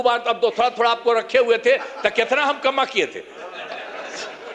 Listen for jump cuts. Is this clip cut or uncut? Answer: uncut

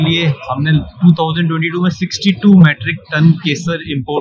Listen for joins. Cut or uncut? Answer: uncut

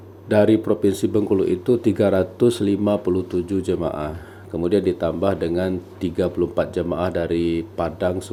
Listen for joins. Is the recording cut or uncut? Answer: uncut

